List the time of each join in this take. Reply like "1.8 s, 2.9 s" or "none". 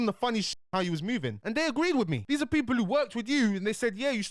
none